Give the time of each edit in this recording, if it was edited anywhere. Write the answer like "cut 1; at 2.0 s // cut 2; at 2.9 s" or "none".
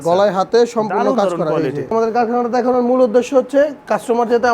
cut 1; at 1.9 s